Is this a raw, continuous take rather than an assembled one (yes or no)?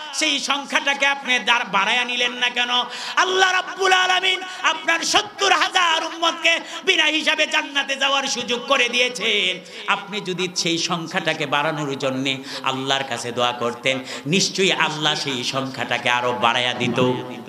yes